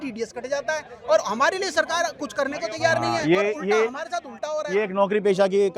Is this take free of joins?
yes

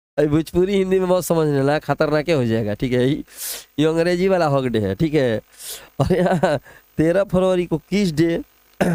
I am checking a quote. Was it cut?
no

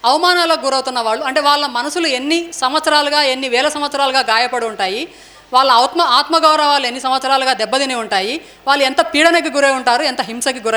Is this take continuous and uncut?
yes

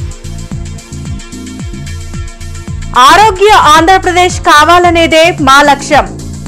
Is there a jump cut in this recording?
no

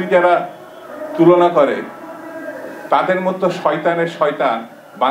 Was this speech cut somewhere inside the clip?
no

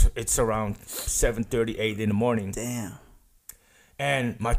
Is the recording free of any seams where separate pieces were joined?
yes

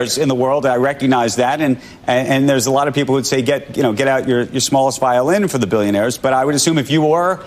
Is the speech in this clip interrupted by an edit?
no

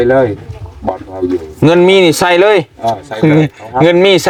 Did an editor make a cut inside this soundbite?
no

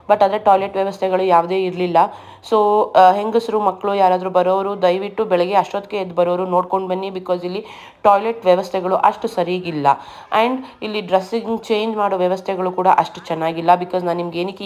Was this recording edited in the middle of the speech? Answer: no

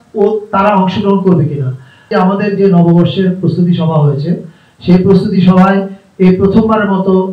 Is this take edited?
yes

